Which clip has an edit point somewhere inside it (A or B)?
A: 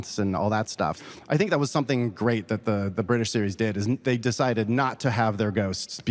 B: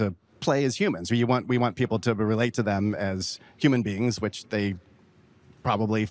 A